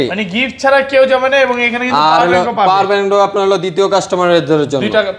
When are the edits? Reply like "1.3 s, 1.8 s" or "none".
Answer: none